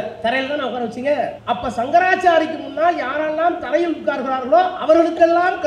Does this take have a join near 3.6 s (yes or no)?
no